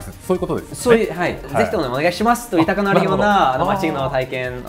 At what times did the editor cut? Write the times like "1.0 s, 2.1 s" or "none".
1.4 s